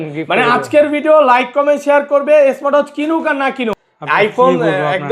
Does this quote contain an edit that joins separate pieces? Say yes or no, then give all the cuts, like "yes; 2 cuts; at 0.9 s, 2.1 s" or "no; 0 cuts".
yes; 1 cut; at 3.9 s